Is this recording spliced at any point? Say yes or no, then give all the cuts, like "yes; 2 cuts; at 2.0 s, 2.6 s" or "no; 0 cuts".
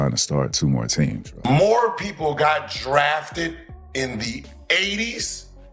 yes; 1 cut; at 1.5 s